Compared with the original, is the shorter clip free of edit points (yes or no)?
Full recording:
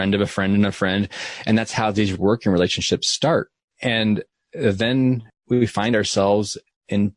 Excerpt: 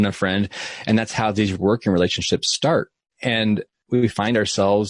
no